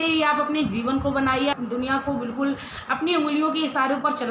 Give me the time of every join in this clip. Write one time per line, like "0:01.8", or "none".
0:01.5